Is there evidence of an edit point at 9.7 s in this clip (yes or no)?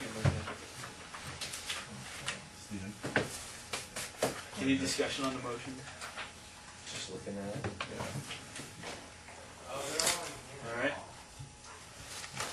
no